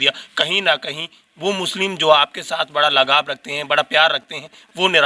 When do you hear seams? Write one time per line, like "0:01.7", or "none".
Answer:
none